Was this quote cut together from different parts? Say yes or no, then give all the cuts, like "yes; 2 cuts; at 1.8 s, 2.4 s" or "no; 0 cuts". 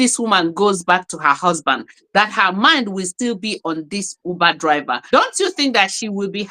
yes; 1 cut; at 5.0 s